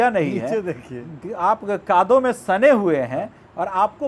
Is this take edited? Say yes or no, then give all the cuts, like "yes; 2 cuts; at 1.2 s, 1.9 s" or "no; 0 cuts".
no; 0 cuts